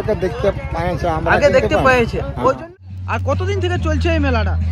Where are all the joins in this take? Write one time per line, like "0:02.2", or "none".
0:02.6